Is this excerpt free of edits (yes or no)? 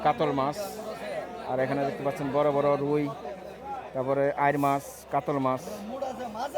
yes